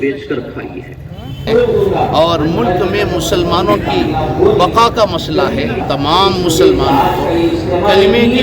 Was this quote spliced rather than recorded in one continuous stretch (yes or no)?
yes